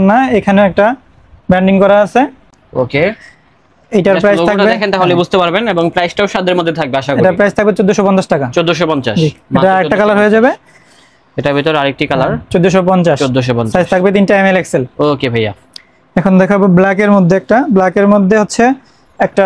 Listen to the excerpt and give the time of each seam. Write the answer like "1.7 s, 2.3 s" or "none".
none